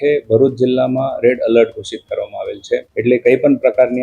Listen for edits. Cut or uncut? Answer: cut